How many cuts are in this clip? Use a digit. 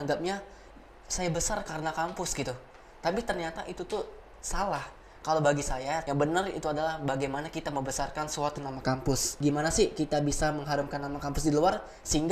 2